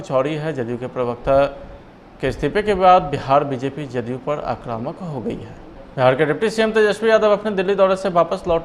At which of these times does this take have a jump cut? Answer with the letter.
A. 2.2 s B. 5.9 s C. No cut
B